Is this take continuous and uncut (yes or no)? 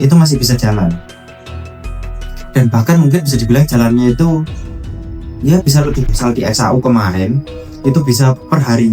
no